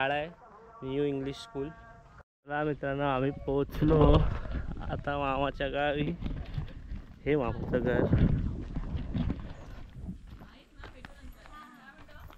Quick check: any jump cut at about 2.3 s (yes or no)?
yes